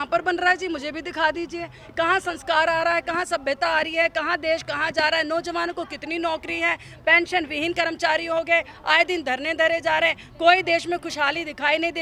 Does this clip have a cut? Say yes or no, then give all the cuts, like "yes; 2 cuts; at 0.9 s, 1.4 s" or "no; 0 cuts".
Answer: no; 0 cuts